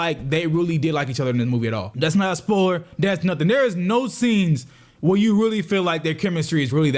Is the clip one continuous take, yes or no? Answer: no